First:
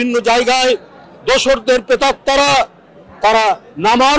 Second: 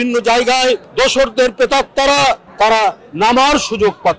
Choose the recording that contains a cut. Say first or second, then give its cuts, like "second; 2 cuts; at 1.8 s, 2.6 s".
second; 2 cuts; at 0.9 s, 2.5 s